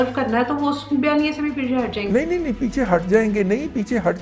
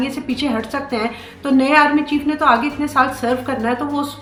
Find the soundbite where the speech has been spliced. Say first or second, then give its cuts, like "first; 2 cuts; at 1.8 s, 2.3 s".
first; 1 cut; at 2.0 s